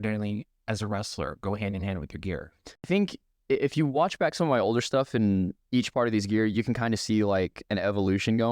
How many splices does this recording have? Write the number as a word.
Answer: one